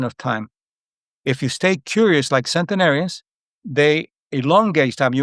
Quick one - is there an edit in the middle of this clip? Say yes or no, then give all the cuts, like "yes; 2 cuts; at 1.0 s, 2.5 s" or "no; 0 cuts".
no; 0 cuts